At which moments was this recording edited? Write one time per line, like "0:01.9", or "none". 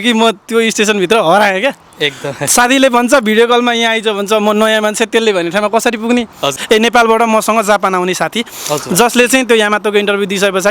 0:06.5